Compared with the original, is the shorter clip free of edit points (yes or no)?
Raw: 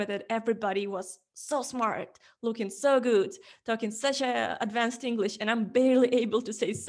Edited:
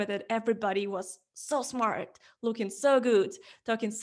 yes